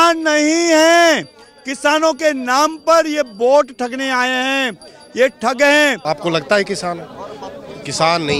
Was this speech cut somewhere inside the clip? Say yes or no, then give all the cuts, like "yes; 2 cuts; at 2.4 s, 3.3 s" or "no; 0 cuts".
yes; 1 cut; at 6.0 s